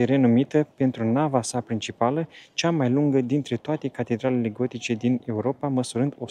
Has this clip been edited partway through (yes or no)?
no